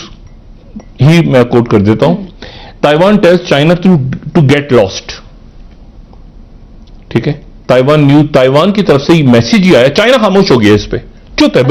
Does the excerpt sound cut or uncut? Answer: uncut